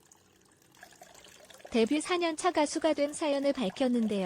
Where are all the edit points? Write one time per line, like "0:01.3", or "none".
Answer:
0:01.7